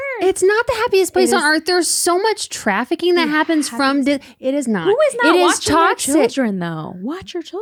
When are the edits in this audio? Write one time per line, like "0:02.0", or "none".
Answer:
none